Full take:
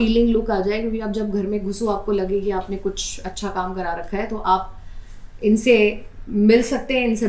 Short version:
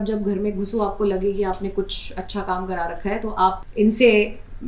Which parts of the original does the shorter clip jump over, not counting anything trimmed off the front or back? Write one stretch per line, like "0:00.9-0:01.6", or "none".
0:04.7-0:05.3